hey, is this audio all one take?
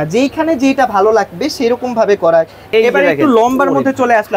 no; 1 cut; at 2.6 s

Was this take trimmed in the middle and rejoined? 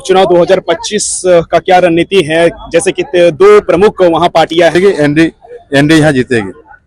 yes; 1 cut; at 4.7 s

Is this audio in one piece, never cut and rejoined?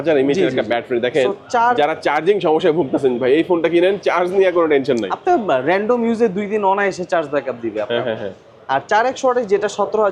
yes; 0 cuts

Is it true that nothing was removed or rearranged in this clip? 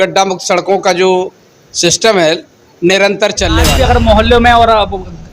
no; 1 cut; at 3.7 s

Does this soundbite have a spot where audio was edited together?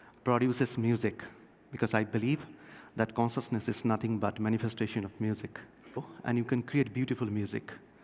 no; 0 cuts

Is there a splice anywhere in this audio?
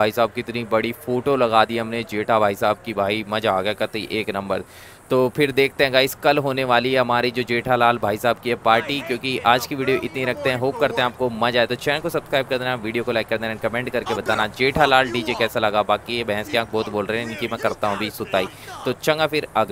no; 0 cuts

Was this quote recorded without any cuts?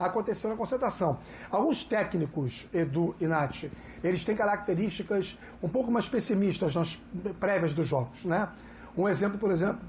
yes; 0 cuts

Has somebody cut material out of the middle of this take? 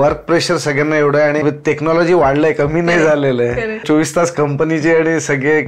yes; 2 cuts; at 1.4 s, 3.8 s

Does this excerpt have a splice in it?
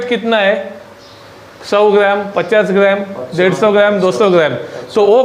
no; 0 cuts

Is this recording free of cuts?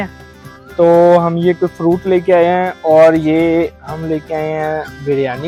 yes; 0 cuts

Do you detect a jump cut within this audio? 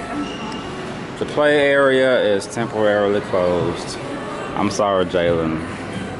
no; 0 cuts

